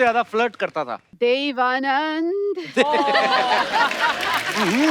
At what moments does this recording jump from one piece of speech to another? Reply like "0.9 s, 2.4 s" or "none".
1.0 s